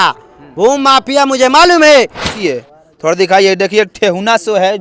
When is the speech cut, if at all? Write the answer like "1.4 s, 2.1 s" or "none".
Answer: 2.3 s

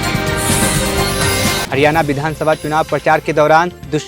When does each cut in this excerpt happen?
none

